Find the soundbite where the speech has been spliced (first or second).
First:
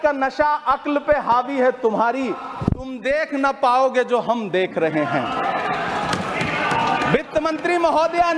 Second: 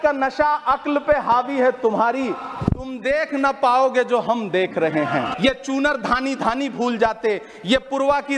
second